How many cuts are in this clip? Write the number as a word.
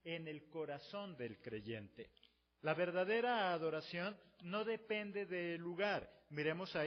zero